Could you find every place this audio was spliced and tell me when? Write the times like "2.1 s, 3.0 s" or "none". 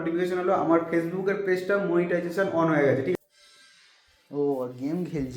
3.2 s